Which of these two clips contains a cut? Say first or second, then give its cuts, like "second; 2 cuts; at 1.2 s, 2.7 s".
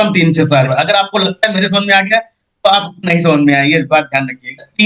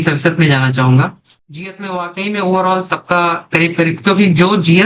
second; 1 cut; at 1.3 s